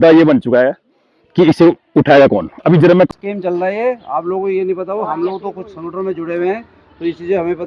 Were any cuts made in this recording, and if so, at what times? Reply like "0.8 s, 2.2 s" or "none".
3.1 s